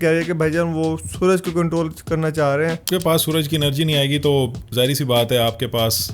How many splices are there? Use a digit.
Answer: 1